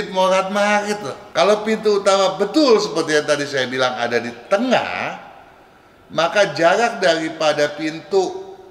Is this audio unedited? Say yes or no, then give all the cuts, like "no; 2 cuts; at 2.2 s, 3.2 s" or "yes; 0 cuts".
no; 1 cut; at 1.2 s